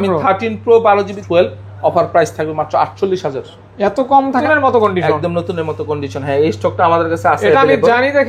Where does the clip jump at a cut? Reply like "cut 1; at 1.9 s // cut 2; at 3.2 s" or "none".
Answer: cut 1; at 1.2 s // cut 2; at 4.4 s